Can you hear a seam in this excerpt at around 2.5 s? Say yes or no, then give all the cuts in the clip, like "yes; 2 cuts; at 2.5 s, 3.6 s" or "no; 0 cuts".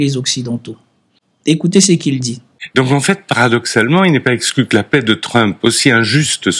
yes; 1 cut; at 2.5 s